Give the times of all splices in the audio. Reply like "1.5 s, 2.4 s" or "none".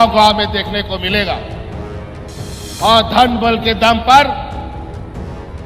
1.5 s, 2.8 s